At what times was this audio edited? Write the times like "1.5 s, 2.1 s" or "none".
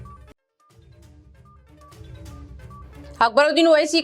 1.3 s